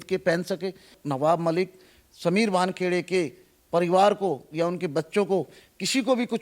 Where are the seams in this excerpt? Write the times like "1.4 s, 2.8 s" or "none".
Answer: 0.9 s